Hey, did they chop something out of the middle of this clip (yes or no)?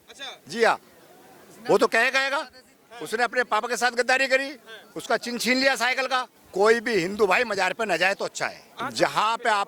yes